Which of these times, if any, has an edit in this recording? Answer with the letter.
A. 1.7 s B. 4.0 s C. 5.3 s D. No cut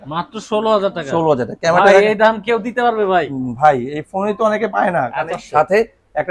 C